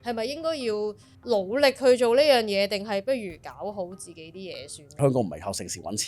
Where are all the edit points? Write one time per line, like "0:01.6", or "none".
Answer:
0:01.1
0:05.0